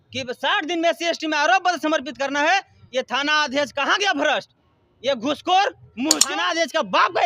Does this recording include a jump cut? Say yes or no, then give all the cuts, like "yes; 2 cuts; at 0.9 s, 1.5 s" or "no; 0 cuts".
yes; 1 cut; at 6.2 s